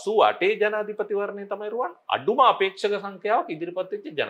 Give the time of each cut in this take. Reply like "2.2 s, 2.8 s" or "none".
none